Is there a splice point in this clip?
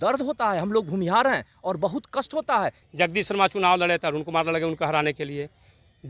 yes; 1 cut; at 2.8 s

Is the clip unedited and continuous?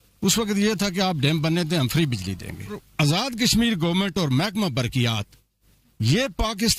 no; 1 cut; at 2.8 s

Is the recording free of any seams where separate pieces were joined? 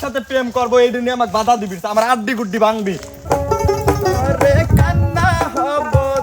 no; 1 cut; at 3.2 s

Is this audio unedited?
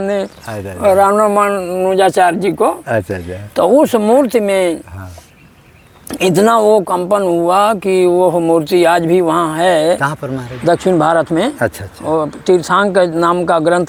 yes; 0 cuts

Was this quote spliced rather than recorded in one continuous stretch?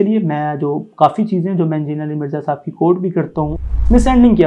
yes; 1 cut; at 3.6 s

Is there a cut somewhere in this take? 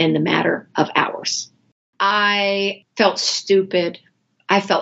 yes; 2 cuts; at 1.9 s, 2.8 s

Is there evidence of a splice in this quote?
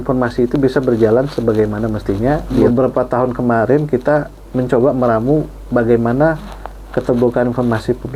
yes; 1 cut; at 2.5 s

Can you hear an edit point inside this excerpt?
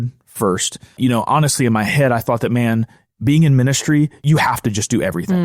yes; 2 cuts; at 1.0 s, 4.2 s

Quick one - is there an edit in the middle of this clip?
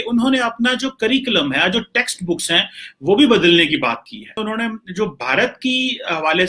yes; 1 cut; at 4.4 s

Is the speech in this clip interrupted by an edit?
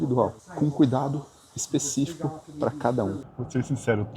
yes; 1 cut; at 3.2 s

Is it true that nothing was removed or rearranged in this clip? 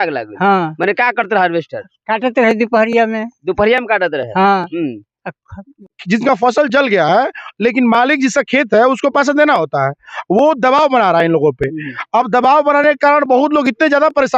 no; 1 cut; at 5.9 s

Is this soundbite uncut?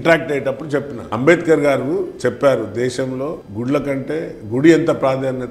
no; 2 cuts; at 1.0 s, 3.5 s

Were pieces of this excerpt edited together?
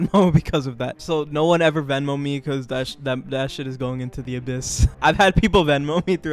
yes; 2 cuts; at 1.0 s, 4.9 s

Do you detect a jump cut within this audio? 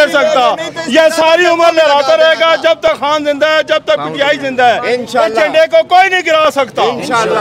no; 0 cuts

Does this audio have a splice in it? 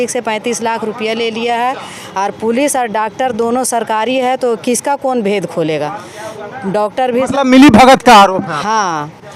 no; 0 cuts

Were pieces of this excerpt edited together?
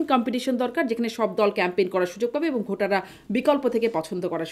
no; 0 cuts

